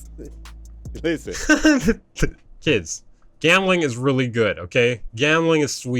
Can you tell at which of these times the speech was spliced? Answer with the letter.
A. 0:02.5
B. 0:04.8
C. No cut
A